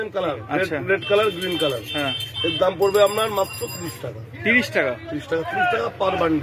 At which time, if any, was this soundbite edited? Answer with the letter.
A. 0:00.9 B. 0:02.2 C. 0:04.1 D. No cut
D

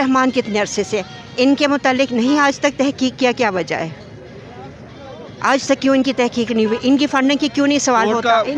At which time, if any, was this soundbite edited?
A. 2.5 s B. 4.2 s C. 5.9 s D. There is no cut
D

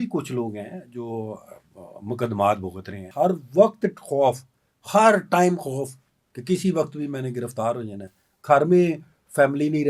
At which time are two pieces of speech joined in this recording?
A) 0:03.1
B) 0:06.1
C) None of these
A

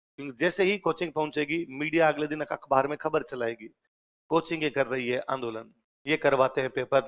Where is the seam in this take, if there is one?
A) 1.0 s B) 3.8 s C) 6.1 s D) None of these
D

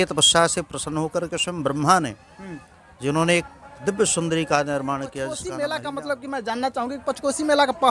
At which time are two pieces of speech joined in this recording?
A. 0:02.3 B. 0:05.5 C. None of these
B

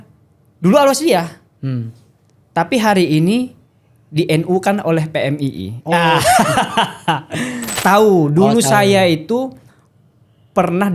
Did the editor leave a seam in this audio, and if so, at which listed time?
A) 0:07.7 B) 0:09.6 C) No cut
A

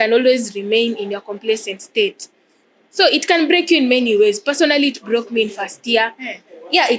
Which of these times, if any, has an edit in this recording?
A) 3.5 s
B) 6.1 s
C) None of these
C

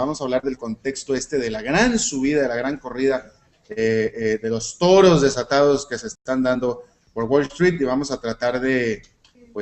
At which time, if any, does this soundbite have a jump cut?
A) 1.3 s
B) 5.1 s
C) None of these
A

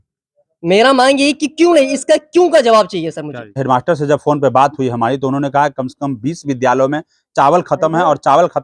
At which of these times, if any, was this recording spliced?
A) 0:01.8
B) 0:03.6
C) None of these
B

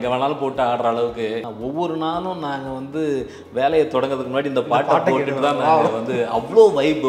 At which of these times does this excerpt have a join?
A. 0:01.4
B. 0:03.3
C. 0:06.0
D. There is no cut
A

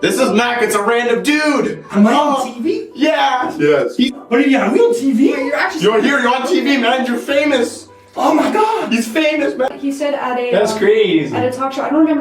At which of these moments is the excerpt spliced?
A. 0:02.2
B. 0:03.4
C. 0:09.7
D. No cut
C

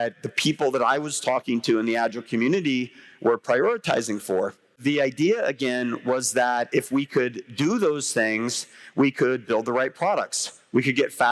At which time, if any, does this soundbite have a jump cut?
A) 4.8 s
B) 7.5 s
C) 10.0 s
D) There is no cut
A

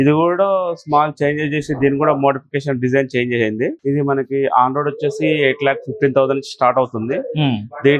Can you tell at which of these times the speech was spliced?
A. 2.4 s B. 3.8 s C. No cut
B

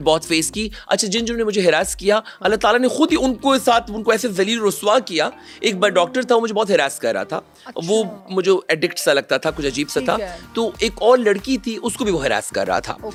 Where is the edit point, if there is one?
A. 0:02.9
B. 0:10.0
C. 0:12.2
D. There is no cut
D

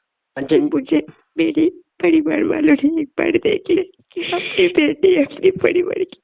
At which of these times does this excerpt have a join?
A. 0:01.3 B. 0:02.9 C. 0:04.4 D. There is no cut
C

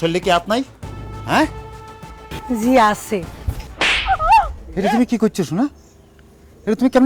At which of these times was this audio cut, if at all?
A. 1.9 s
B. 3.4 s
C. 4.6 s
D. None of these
C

